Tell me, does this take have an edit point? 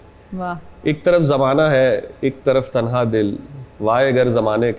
no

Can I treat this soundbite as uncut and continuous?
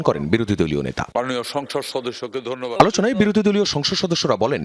no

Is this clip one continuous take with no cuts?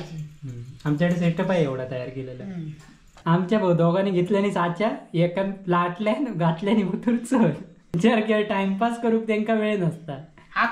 no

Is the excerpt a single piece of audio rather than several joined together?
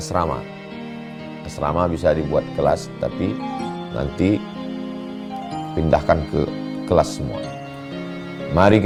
yes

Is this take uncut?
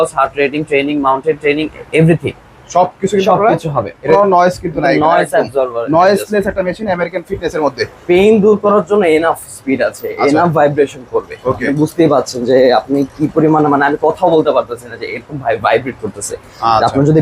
no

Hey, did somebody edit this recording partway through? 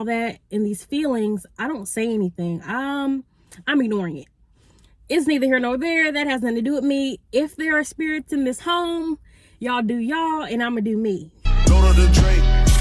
yes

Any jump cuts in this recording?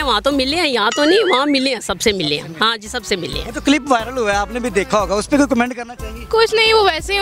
no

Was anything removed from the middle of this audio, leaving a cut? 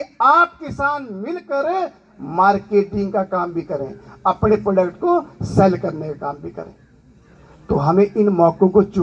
no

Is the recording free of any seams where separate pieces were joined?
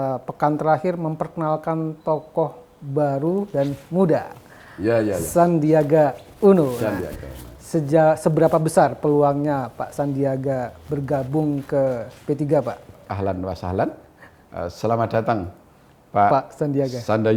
no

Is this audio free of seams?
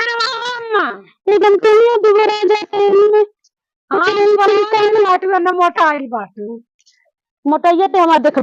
yes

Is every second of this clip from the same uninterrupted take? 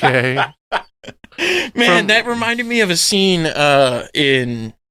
yes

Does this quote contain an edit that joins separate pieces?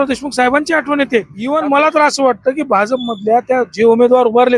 yes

